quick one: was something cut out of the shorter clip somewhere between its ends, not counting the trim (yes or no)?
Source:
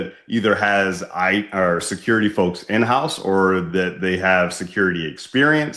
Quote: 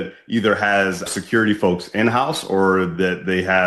yes